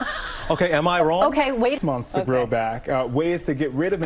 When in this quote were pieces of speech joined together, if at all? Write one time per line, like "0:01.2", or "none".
none